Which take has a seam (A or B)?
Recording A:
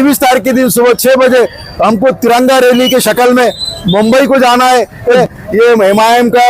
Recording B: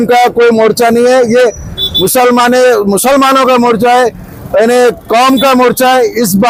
A